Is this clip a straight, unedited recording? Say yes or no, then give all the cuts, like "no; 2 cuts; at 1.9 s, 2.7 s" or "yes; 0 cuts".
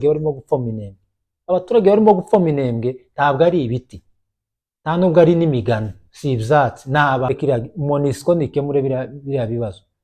no; 1 cut; at 7.3 s